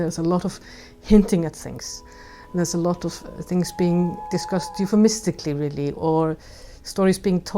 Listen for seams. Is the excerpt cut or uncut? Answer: cut